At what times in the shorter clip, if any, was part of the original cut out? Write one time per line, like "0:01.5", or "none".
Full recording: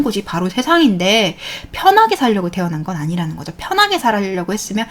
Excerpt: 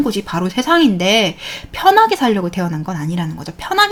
none